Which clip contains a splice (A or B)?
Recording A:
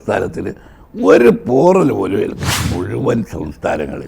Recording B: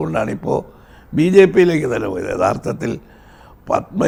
A